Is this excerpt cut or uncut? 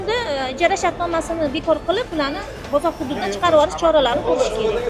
uncut